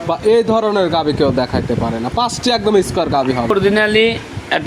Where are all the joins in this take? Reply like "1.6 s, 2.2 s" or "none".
3.5 s